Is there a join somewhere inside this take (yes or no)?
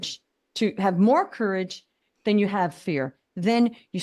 no